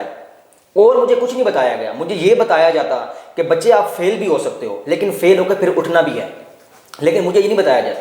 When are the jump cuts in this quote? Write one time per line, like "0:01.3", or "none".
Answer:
none